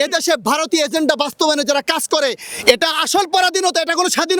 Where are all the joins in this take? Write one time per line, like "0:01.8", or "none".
none